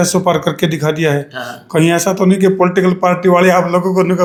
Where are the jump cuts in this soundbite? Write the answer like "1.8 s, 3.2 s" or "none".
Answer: none